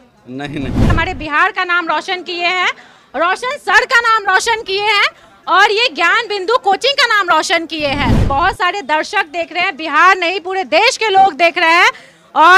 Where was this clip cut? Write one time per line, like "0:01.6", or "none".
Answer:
0:00.9
0:08.2